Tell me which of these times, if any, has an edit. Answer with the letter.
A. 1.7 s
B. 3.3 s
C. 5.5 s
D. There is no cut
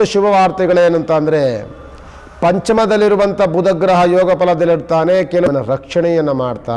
C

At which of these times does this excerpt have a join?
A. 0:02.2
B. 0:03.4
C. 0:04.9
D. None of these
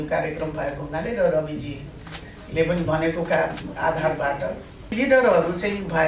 C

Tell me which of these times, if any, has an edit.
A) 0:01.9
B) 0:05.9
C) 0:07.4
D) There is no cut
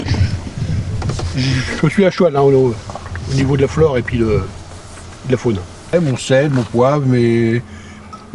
B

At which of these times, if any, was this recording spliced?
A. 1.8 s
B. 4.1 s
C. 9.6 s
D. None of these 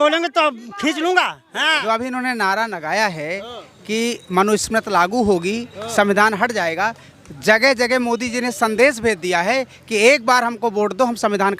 A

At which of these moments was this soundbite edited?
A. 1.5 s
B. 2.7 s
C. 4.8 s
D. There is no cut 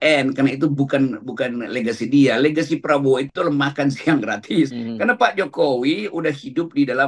C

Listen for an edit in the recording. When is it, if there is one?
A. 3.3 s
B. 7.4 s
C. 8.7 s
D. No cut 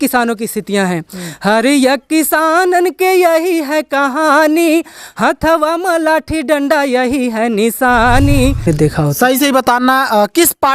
C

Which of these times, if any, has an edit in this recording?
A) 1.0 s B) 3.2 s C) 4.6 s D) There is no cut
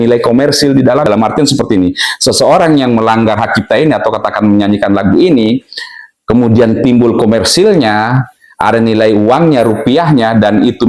A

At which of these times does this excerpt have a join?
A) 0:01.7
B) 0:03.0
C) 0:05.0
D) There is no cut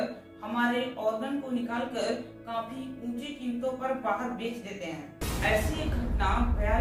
D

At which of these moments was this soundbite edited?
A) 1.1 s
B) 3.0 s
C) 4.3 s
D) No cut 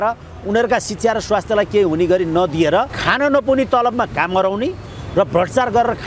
B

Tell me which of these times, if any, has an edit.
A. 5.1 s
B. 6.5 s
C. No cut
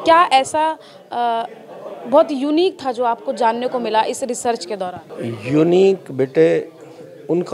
A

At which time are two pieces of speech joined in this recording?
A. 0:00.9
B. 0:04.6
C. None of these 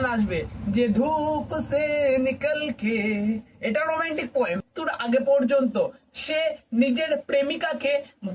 B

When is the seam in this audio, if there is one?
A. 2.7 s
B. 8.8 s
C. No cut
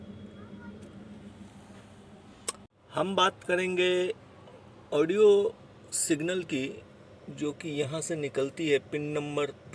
A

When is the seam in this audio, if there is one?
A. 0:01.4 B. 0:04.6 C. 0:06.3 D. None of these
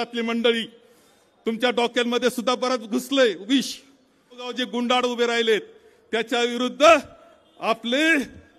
B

